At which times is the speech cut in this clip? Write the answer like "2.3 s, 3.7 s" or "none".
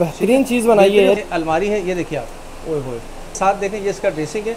1.2 s, 3.4 s